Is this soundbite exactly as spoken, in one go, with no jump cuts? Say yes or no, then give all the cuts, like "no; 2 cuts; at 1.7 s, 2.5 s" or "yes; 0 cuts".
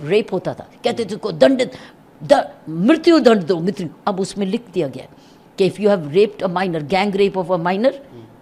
yes; 0 cuts